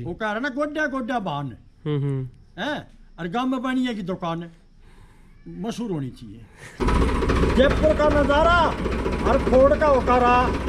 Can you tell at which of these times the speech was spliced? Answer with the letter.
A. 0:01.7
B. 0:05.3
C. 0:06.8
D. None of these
C